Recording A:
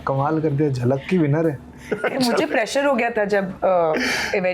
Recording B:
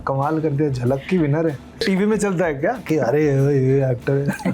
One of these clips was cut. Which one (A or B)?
B